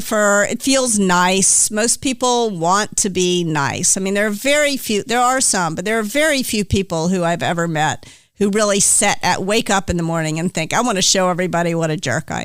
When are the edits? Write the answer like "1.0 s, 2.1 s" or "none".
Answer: none